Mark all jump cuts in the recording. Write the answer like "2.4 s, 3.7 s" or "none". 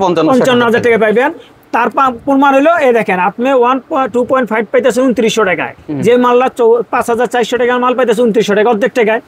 none

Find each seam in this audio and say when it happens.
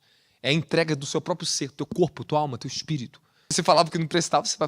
3.5 s

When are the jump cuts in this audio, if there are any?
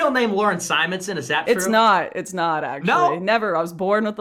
none

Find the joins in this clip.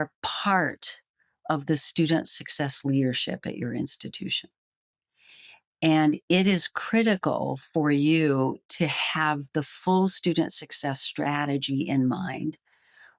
none

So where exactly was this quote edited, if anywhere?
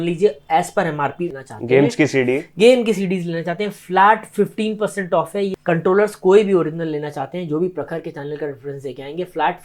1.3 s, 5.5 s

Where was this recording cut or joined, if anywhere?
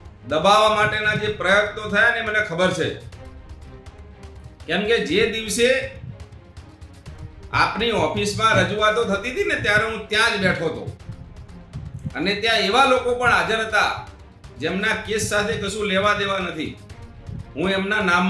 none

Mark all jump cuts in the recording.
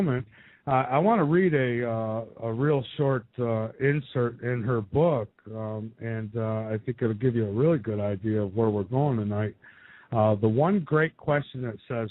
none

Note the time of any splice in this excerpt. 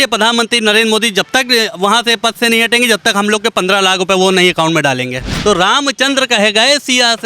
5.2 s

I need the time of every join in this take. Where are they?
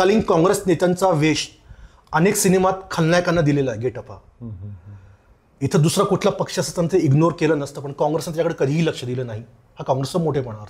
none

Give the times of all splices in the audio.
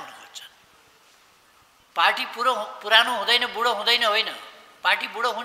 1.8 s

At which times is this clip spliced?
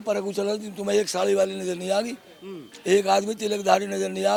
none

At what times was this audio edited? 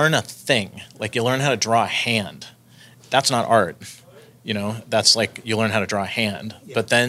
none

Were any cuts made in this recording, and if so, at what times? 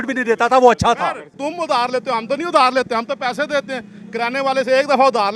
1.3 s

